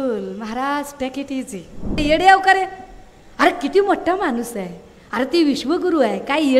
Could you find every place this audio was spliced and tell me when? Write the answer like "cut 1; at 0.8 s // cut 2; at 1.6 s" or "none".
cut 1; at 2.0 s